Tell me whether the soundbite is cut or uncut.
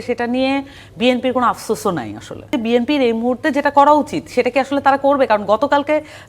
cut